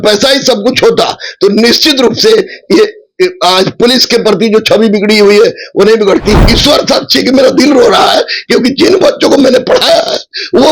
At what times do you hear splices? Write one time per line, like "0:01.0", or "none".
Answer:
0:06.5